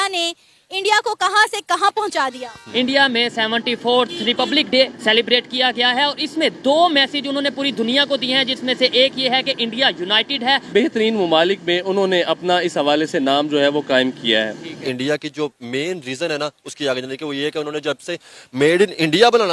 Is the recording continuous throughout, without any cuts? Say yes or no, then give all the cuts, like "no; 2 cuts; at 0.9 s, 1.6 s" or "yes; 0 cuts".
no; 3 cuts; at 2.6 s, 10.7 s, 14.8 s